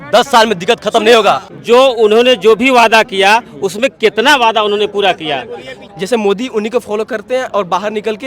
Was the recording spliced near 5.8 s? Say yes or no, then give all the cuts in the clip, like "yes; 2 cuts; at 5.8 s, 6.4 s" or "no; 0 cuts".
yes; 2 cuts; at 1.5 s, 5.8 s